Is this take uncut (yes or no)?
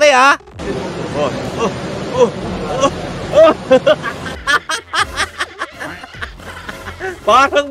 yes